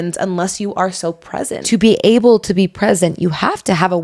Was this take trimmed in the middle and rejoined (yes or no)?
yes